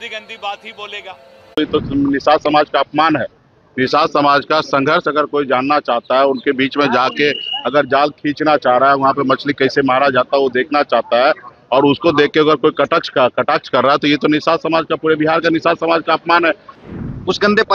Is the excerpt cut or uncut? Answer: cut